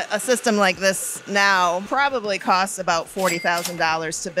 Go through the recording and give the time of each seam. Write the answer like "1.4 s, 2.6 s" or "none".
1.9 s